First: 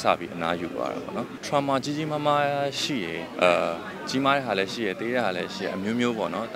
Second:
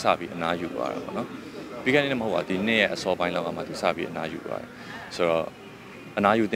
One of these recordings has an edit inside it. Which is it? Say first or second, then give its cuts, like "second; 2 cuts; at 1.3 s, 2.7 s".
first; 1 cut; at 1.4 s